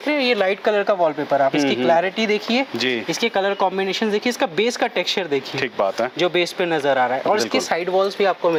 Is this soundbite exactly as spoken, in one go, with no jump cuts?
yes; 0 cuts

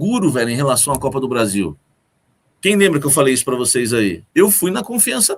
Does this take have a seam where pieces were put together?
yes; 1 cut; at 4.2 s

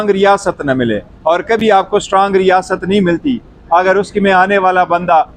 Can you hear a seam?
no; 0 cuts

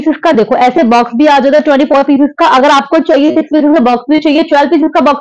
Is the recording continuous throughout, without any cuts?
yes; 0 cuts

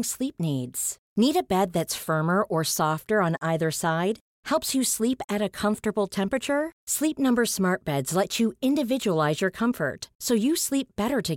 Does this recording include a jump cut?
no; 0 cuts

